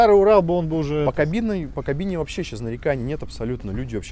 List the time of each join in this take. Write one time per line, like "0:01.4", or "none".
none